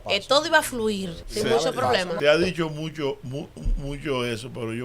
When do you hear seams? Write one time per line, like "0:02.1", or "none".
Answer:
0:01.2
0:02.1